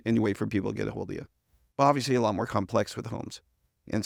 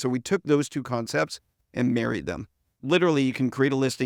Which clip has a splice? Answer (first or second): second